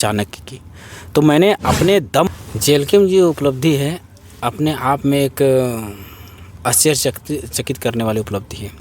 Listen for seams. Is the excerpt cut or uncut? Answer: cut